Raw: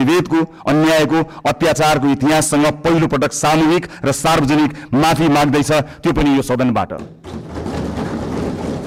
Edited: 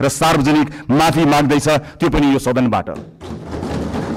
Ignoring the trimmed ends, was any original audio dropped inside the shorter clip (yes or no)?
no